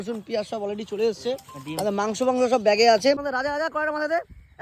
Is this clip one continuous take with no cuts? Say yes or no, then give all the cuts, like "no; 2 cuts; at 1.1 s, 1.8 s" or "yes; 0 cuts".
no; 1 cut; at 3.2 s